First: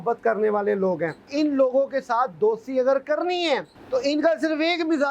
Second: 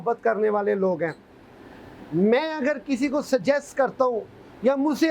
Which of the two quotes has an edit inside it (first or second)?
first